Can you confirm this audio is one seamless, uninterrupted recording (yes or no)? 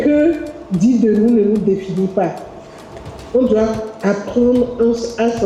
yes